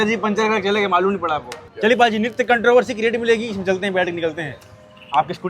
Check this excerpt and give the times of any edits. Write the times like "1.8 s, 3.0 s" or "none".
1.6 s